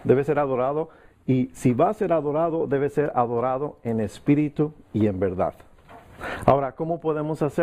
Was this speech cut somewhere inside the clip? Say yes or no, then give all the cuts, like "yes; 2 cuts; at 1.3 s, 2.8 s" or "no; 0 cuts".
yes; 1 cut; at 3.1 s